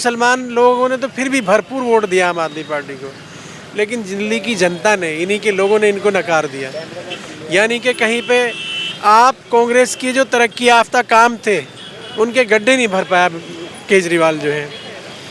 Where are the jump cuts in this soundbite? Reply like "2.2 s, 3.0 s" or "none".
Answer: none